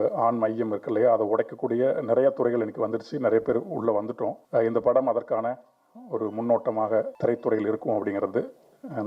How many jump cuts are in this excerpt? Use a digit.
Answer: 2